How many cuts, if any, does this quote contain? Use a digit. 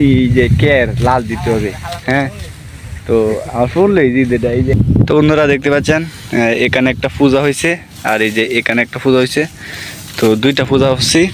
1